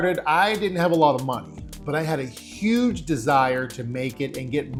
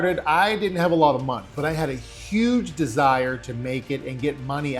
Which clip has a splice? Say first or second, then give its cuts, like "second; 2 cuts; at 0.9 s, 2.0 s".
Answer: second; 1 cut; at 1.5 s